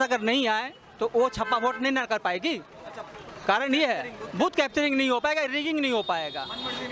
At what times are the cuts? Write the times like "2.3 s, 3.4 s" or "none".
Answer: none